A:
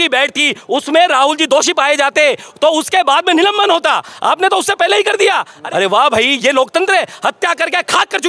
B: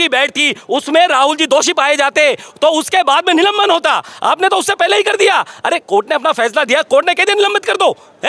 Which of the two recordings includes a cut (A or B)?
A